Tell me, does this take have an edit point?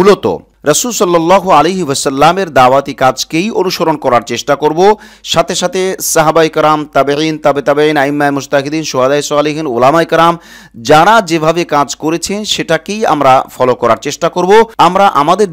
no; 0 cuts

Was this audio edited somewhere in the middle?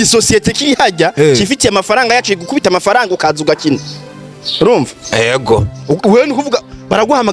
no; 0 cuts

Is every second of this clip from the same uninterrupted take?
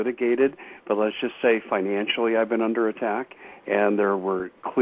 no; 1 cut; at 1.2 s

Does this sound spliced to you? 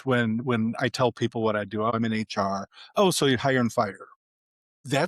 yes; 1 cut; at 1.9 s

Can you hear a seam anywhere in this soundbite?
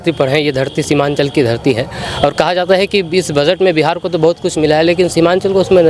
no; 0 cuts

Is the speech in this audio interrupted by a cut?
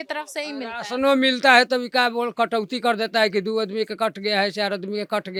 no; 0 cuts

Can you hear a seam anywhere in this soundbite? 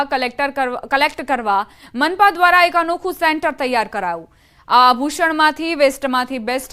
yes; 1 cut; at 1.4 s

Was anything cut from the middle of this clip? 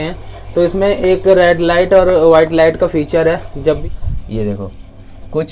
yes; 1 cut; at 3.8 s

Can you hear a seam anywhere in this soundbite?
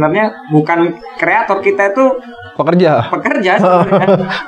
no; 0 cuts

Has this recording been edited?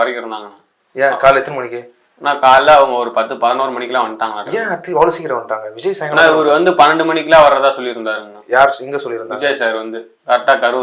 no; 0 cuts

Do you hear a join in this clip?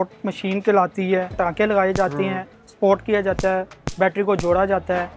no; 0 cuts

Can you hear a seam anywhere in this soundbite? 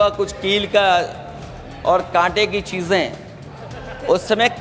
no; 0 cuts

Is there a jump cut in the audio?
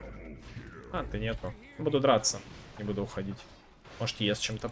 no; 0 cuts

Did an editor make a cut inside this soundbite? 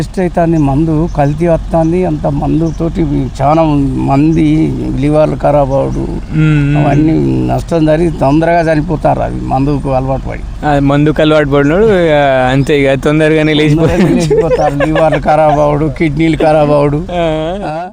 no; 0 cuts

